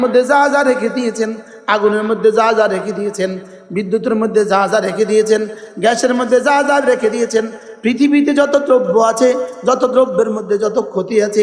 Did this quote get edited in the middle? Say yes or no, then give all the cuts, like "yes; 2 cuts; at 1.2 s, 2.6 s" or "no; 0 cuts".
no; 0 cuts